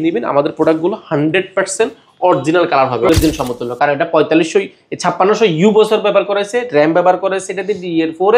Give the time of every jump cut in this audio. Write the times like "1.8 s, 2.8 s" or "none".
3.1 s